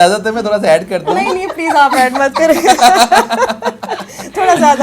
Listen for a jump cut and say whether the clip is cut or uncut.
uncut